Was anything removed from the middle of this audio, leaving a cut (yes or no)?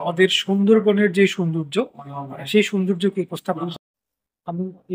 yes